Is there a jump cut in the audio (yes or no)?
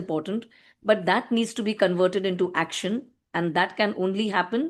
no